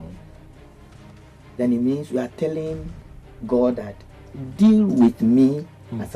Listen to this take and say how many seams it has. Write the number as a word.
zero